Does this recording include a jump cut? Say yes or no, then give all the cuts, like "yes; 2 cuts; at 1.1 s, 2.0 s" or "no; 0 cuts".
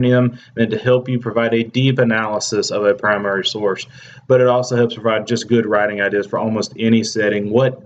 yes; 1 cut; at 4.3 s